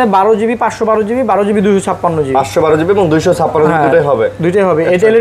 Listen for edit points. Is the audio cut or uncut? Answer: uncut